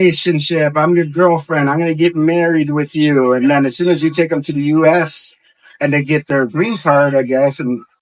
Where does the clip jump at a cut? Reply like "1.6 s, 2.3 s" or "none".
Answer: none